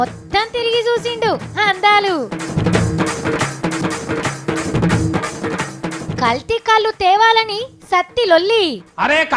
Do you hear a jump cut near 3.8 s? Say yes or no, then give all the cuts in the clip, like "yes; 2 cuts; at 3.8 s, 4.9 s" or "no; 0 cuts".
yes; 2 cuts; at 3.8 s, 5.2 s